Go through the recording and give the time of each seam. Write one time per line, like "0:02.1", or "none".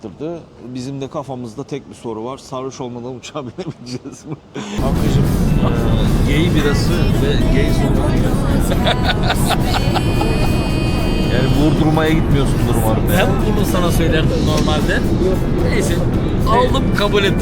0:04.8